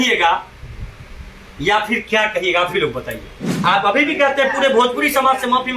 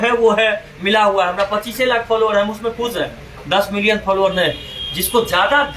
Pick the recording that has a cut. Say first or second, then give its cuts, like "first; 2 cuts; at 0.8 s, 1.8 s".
first; 1 cut; at 3.5 s